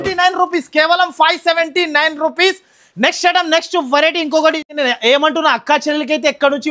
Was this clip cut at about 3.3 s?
no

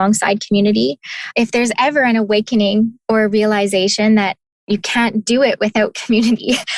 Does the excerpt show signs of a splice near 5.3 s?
no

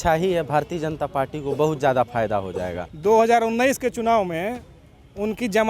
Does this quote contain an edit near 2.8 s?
yes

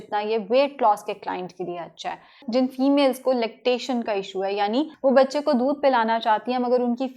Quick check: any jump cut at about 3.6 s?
no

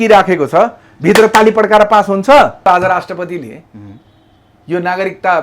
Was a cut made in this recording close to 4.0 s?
no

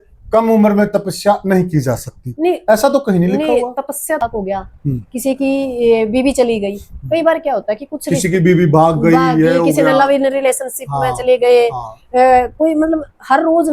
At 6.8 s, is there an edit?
no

